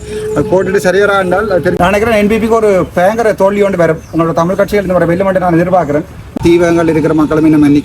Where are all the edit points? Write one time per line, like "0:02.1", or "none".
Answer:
0:01.8
0:06.4